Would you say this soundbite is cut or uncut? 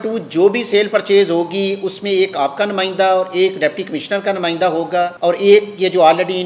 cut